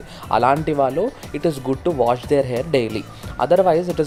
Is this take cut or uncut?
uncut